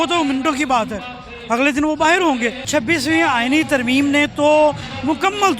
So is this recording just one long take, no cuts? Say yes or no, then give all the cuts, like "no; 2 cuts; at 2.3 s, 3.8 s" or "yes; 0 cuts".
no; 1 cut; at 2.7 s